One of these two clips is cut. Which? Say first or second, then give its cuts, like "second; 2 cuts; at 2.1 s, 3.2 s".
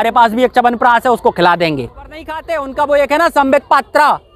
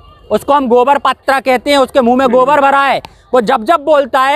first; 1 cut; at 2.4 s